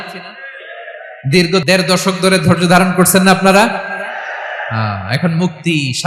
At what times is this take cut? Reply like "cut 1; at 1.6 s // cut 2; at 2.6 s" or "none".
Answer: none